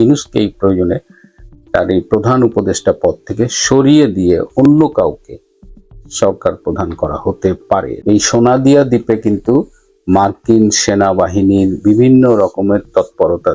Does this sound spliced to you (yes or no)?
yes